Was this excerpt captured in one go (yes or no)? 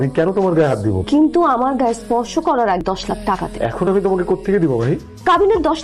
no